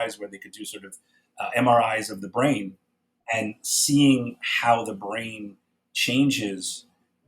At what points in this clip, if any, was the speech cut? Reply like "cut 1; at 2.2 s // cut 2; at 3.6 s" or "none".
cut 1; at 2.7 s